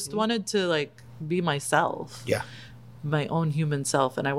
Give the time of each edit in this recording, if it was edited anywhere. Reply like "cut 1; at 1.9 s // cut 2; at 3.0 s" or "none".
none